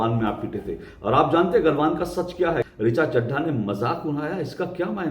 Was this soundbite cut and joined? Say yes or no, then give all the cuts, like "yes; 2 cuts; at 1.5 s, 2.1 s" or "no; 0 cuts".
yes; 1 cut; at 2.6 s